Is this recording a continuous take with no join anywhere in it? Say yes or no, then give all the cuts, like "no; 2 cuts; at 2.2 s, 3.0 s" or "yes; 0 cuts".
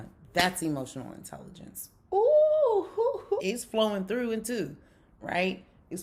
yes; 0 cuts